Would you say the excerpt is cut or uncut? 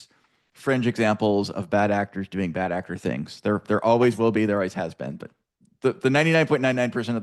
uncut